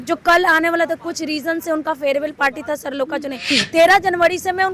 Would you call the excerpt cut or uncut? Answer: cut